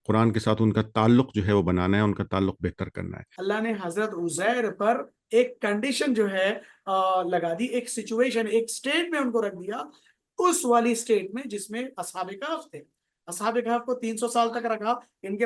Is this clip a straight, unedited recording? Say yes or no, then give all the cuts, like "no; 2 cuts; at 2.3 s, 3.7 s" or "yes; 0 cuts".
no; 1 cut; at 3.3 s